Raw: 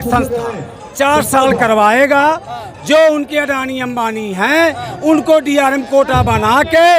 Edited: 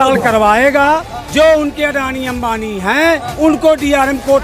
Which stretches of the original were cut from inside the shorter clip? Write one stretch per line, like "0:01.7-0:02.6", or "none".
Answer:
0:02.5-0:02.7
0:04.8-0:04.9